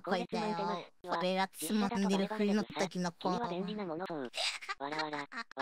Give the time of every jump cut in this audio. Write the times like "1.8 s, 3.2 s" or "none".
4.1 s